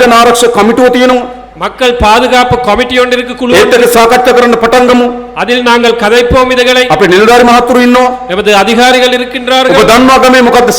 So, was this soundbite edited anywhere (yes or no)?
no